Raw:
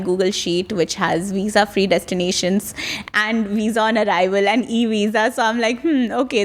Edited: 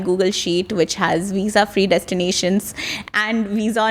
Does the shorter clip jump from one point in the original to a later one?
no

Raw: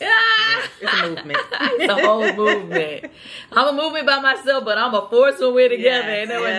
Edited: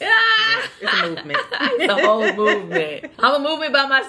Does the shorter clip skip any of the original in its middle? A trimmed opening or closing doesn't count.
yes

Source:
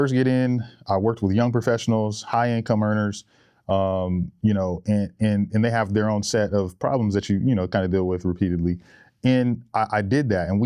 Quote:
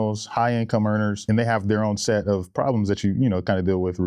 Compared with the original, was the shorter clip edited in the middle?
yes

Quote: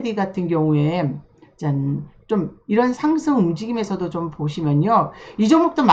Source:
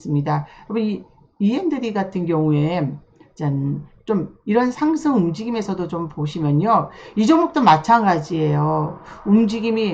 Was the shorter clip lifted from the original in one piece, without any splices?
yes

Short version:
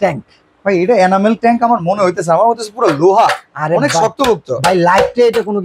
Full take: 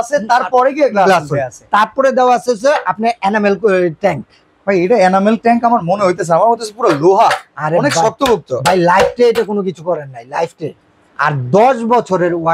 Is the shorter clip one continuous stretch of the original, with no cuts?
yes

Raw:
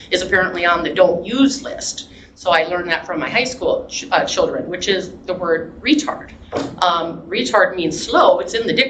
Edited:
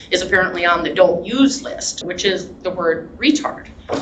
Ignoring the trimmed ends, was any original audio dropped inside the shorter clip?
yes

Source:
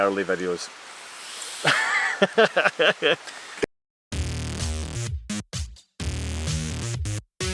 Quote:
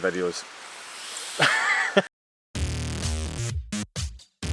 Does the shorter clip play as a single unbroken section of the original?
no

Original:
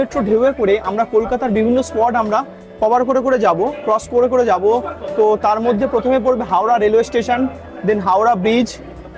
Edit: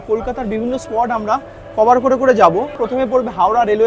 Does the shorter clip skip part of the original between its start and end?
yes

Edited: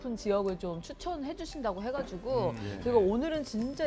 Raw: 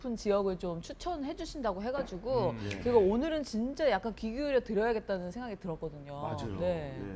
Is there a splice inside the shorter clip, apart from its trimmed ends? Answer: no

